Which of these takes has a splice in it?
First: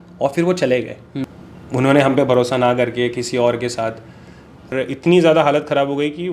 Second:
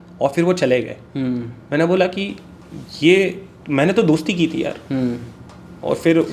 first; 2 cuts; at 1.1 s, 4.7 s

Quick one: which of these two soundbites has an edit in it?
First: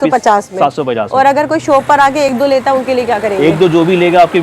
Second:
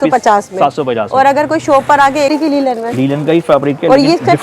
second; 1 cut; at 2.3 s

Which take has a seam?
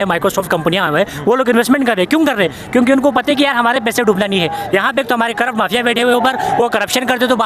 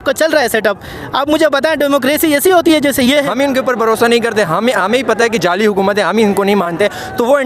second; 1 cut; at 3.3 s

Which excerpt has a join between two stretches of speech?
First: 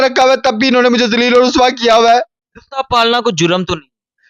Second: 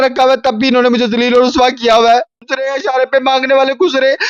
second; 1 cut; at 2.4 s

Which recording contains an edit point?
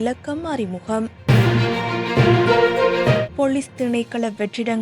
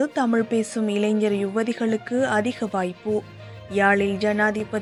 first; 2 cuts; at 1.2 s, 3.3 s

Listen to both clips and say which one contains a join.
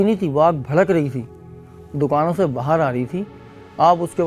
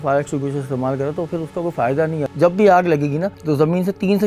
second; 2 cuts; at 2.3 s, 3.3 s

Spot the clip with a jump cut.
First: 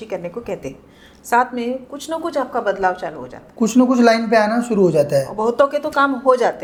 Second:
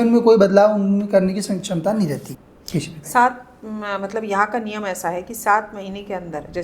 second; 1 cut; at 2.3 s

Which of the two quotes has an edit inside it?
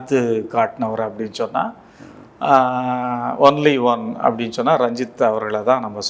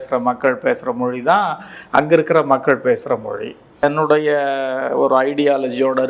second; 1 cut; at 3.7 s

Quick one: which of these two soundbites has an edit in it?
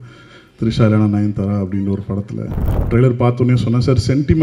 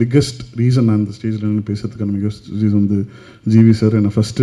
first; 1 cut; at 2.7 s

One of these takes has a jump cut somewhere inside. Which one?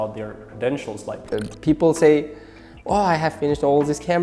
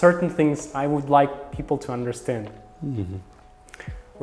first; 1 cut; at 1.3 s

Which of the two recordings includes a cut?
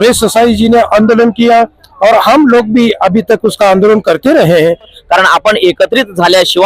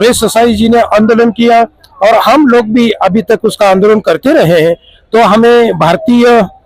first; 1 cut; at 5.0 s

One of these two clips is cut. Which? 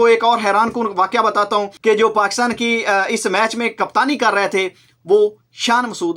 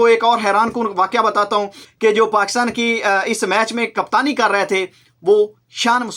first; 1 cut; at 1.7 s

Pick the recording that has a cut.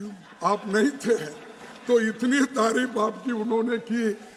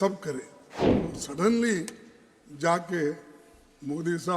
second; 1 cut; at 0.9 s

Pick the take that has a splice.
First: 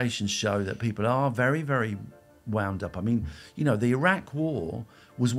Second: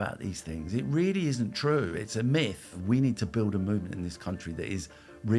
second; 1 cut; at 2.8 s

